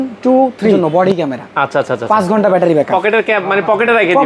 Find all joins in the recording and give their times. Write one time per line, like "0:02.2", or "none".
0:00.9